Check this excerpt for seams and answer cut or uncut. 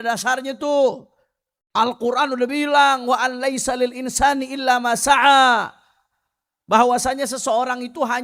uncut